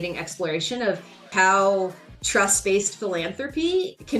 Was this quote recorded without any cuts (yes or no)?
no